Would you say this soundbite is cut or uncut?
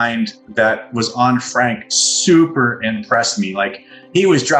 uncut